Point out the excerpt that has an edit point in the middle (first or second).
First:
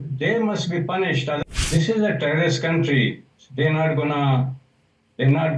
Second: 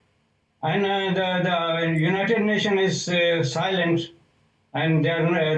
first